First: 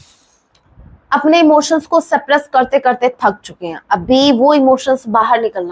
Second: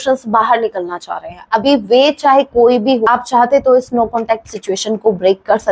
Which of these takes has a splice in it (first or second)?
second